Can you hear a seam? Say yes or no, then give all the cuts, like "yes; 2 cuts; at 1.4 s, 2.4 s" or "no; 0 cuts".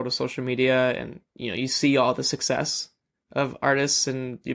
no; 0 cuts